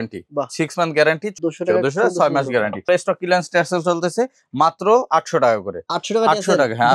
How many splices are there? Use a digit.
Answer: 2